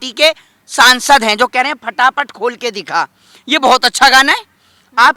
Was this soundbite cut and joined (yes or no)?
no